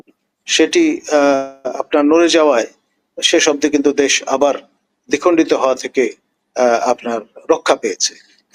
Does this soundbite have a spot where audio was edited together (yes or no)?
no